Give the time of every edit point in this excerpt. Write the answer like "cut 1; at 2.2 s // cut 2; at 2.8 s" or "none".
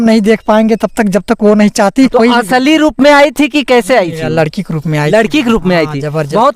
cut 1; at 2.1 s